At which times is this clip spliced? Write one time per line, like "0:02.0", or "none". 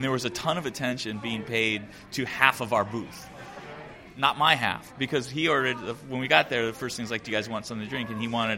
none